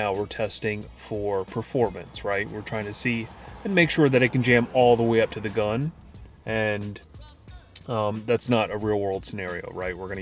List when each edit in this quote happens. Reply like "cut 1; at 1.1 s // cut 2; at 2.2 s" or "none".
none